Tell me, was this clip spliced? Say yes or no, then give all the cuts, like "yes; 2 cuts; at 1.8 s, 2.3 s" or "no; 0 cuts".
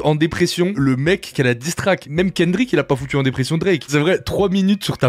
yes; 1 cut; at 3.9 s